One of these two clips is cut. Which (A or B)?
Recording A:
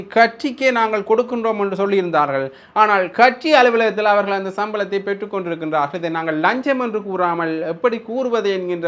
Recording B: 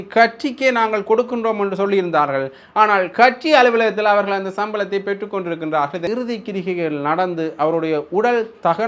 B